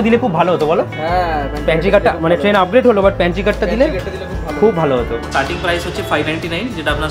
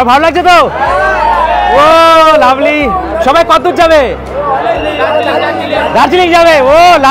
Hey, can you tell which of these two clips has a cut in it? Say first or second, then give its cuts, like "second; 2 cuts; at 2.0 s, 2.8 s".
first; 1 cut; at 5.2 s